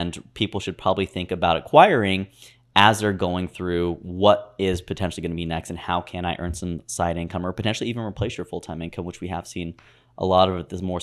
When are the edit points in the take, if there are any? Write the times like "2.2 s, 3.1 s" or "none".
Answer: none